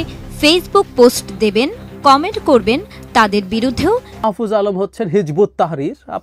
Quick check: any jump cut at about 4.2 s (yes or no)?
yes